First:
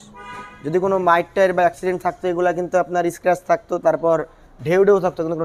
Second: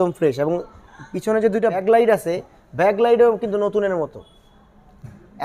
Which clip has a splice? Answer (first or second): second